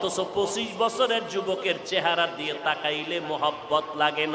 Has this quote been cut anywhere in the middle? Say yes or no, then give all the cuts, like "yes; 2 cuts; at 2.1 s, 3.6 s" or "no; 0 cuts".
no; 0 cuts